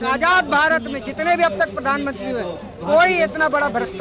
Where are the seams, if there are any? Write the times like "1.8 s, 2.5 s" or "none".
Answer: none